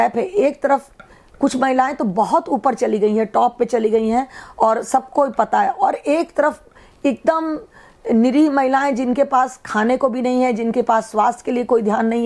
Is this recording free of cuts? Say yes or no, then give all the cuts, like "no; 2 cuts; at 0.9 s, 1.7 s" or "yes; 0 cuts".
yes; 0 cuts